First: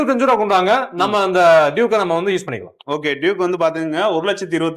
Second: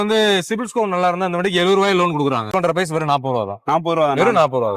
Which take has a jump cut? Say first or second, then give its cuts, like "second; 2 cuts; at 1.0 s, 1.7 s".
second; 1 cut; at 2.5 s